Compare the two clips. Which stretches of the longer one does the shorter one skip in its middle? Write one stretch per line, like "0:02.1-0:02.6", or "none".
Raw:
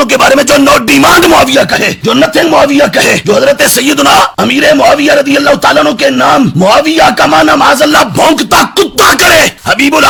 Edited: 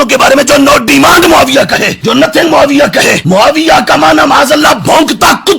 0:03.2-0:06.5